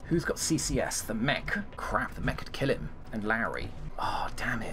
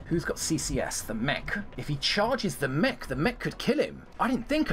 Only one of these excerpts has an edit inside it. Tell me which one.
second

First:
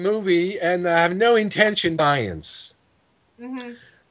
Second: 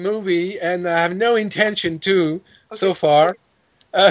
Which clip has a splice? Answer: second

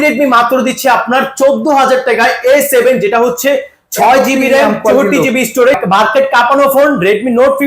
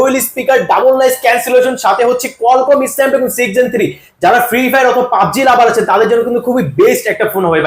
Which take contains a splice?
first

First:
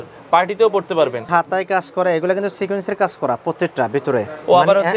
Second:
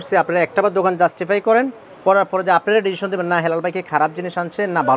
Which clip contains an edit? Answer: first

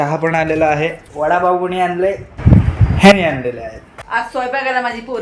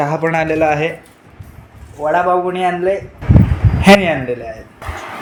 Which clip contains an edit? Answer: first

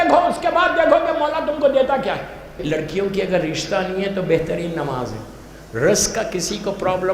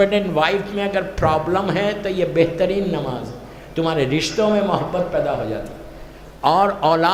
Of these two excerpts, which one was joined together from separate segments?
first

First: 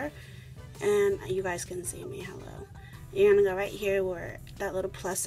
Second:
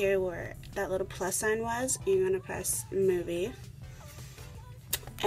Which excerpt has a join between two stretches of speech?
first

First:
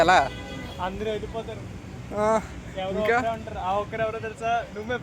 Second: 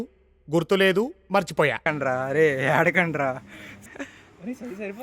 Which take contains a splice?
second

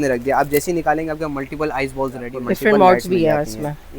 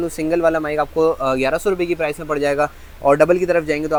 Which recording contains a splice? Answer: first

